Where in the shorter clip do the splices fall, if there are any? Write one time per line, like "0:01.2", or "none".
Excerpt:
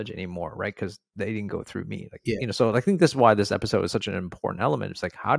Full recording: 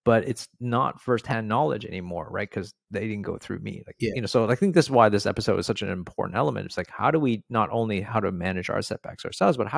none